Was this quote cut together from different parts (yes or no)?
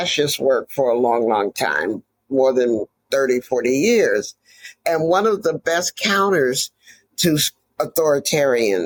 no